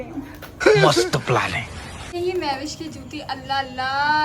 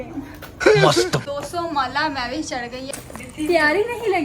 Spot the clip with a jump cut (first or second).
second